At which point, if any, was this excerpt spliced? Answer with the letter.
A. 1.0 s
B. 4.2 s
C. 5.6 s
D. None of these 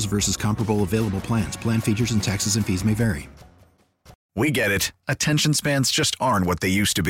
B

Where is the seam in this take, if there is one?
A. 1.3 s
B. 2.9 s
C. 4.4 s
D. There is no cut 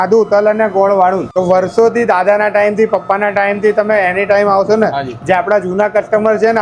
A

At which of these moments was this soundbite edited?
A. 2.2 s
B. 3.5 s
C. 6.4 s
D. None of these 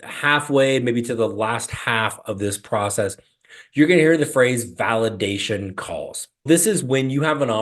C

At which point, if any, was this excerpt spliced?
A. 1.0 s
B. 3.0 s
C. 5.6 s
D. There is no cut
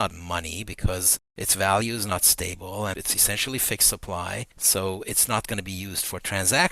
D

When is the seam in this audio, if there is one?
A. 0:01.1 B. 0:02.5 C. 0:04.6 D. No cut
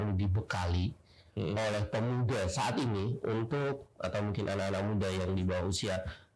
D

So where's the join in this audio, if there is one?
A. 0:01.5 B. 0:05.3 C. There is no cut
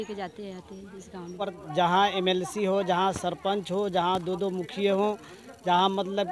A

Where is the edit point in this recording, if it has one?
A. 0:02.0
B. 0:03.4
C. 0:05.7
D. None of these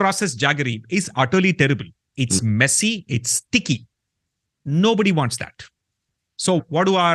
A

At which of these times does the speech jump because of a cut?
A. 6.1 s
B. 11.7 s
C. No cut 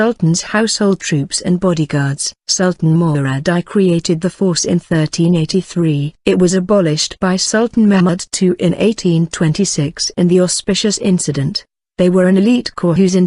B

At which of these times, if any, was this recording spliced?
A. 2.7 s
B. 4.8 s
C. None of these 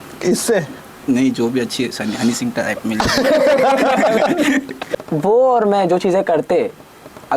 B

